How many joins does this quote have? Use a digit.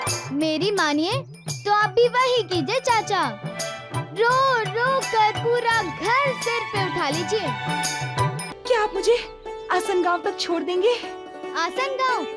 1